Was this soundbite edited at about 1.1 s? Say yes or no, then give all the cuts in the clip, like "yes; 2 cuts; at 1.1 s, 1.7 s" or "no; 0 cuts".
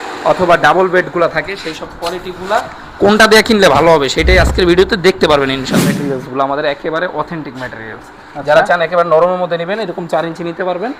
no; 1 cut; at 5.8 s